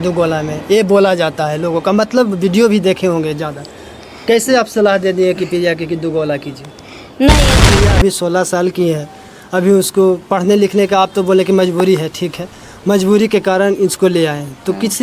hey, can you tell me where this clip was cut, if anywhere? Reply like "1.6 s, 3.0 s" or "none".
7.6 s

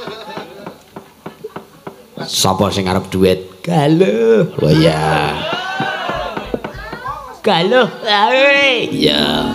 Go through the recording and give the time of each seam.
none

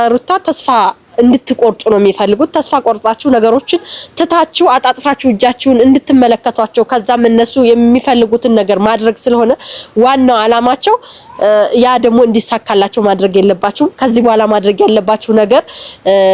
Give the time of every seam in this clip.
none

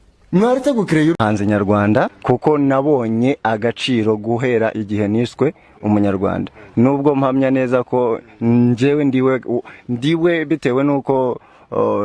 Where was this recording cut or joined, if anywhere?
1.1 s

